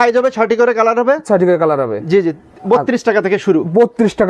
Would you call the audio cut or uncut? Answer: uncut